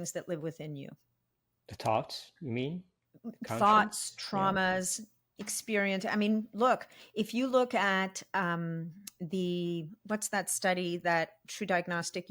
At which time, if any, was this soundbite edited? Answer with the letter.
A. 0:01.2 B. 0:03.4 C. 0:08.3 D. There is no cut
D